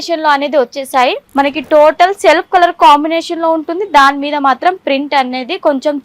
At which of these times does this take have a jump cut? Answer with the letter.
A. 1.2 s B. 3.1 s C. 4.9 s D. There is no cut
A